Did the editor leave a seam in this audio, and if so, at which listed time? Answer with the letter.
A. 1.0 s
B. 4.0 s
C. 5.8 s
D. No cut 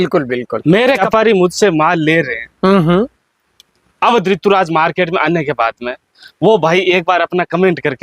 A